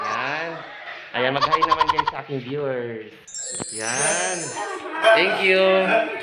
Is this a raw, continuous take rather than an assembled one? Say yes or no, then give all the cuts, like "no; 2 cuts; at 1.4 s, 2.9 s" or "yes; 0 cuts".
yes; 0 cuts